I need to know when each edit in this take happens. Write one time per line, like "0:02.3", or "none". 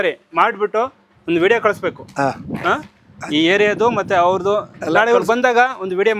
none

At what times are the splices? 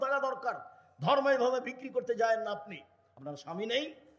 none

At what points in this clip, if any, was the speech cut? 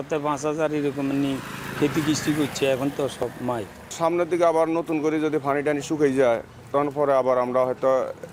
none

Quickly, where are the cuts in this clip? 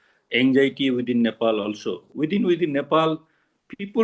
0:02.0

